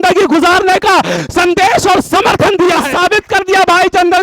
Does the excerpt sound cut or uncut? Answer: cut